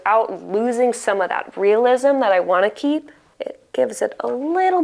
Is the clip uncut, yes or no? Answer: no